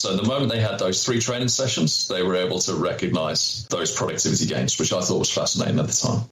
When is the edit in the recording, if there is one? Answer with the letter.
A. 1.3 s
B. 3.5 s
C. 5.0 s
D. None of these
B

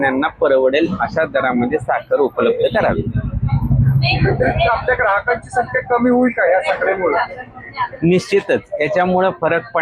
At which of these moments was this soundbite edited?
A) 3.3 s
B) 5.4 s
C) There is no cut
C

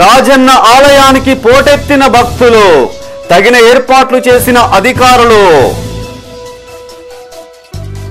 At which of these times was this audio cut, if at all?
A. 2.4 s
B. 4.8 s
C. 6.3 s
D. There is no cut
D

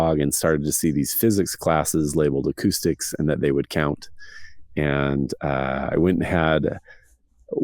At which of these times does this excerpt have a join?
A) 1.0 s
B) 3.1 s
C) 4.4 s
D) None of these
D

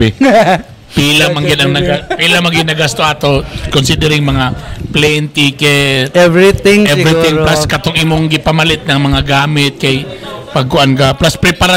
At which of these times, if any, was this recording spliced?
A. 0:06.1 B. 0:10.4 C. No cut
C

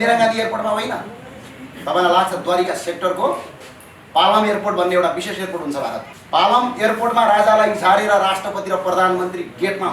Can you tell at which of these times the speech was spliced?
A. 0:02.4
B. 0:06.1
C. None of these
B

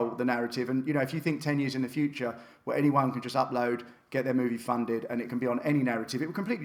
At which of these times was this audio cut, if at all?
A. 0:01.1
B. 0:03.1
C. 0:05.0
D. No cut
D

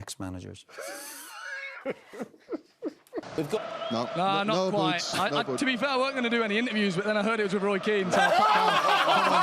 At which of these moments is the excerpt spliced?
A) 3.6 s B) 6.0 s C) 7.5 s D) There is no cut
A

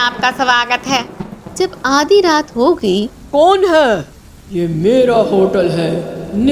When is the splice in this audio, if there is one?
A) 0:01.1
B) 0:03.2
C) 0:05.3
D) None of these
B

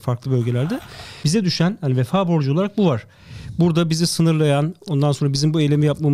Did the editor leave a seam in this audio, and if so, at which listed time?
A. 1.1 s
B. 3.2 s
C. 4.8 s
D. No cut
A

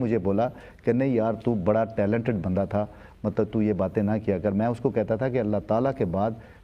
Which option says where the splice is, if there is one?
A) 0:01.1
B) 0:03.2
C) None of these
C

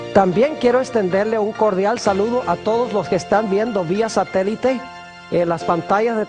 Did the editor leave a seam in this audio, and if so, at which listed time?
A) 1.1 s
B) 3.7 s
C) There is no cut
A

